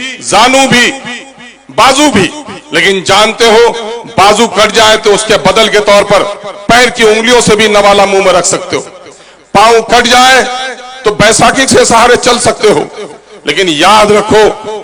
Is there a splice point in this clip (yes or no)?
no